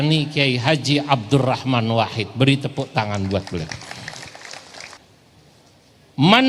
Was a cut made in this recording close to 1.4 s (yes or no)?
no